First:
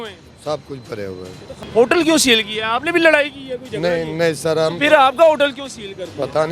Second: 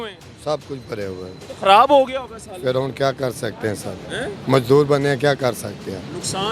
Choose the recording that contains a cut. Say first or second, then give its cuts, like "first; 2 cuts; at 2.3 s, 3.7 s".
first; 1 cut; at 1.5 s